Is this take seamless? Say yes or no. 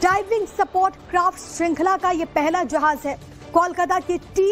yes